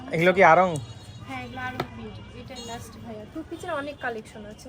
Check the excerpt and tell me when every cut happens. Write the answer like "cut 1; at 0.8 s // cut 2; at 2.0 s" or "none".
none